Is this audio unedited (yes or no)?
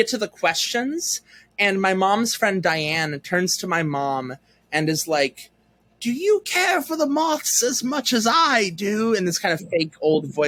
yes